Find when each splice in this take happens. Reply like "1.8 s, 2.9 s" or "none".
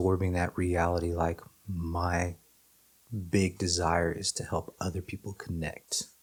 none